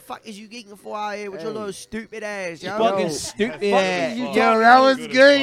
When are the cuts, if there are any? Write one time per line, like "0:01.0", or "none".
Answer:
none